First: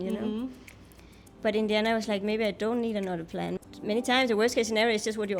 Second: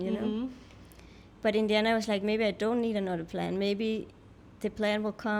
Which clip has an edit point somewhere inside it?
first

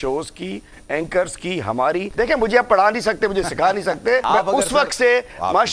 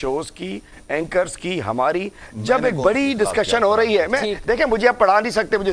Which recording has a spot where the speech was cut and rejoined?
first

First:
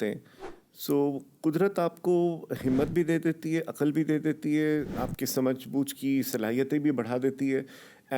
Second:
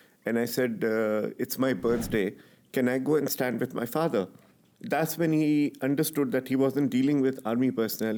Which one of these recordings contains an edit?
first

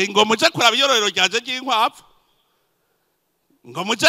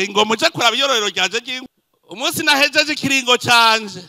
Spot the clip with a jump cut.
second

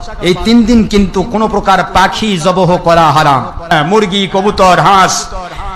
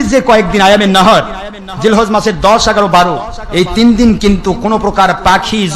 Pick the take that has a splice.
first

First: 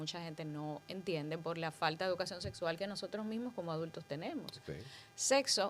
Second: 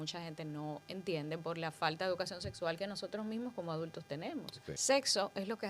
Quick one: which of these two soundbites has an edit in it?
second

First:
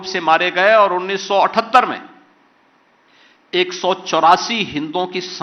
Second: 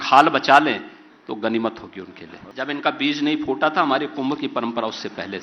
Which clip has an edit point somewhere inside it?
second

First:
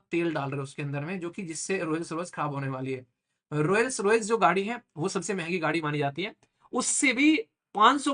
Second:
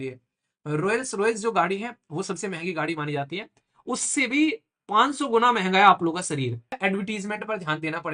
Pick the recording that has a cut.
second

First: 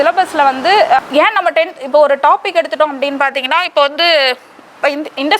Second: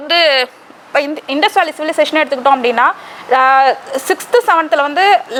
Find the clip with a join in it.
first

